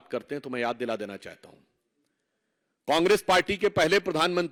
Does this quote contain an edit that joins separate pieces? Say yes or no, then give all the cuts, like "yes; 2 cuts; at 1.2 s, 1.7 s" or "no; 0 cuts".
no; 0 cuts